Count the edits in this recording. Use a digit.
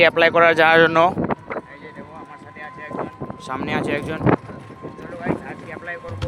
0